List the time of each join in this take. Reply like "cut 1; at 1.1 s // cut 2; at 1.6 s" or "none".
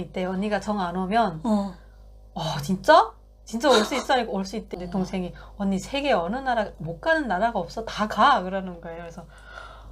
cut 1; at 4.7 s